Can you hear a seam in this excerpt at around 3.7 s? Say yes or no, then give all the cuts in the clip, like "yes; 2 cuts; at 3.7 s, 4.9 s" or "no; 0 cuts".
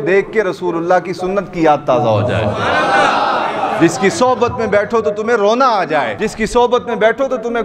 no; 1 cut; at 6.1 s